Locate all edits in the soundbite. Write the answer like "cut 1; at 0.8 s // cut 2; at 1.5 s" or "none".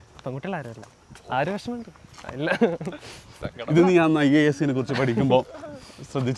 none